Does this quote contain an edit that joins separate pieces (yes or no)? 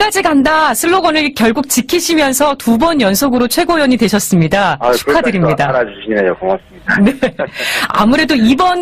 no